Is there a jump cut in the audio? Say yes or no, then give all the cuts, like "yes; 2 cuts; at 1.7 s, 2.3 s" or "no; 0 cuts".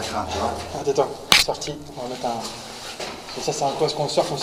no; 0 cuts